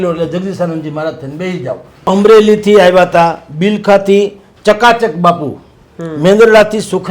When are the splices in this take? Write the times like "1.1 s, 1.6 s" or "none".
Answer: 1.9 s